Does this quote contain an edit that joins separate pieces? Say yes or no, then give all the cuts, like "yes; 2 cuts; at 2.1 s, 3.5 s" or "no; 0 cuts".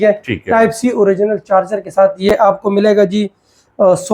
no; 0 cuts